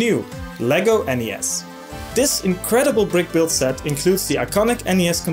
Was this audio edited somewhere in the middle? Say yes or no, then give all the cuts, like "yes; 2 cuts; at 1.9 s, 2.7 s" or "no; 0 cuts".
yes; 1 cut; at 2.6 s